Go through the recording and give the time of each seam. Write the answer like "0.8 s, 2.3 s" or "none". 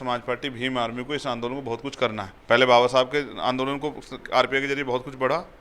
2.3 s

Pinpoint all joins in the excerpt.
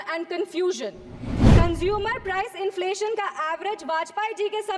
1.3 s

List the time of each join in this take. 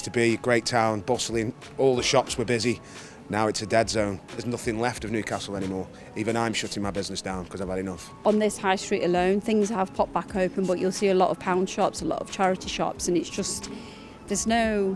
4.4 s, 8.2 s

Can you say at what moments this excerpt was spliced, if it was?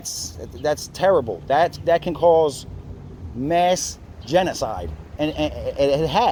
none

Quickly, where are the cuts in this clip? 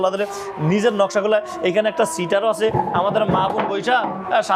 none

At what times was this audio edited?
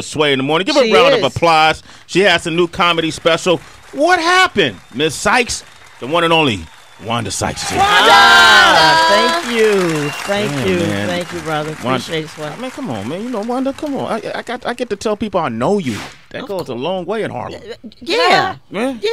17.3 s

